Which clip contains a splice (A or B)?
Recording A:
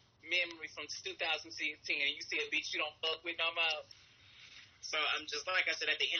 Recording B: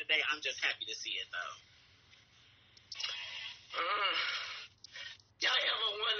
A